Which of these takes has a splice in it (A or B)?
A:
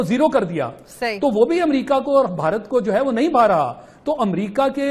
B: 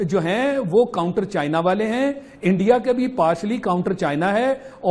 A